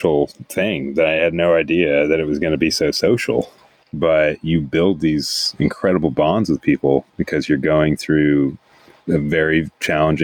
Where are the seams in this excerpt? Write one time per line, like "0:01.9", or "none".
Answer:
none